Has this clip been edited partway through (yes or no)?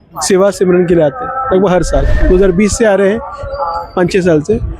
yes